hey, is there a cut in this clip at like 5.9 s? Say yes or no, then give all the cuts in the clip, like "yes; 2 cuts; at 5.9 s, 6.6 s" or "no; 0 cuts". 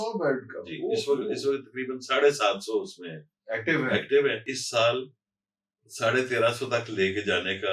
no; 1 cut; at 4.5 s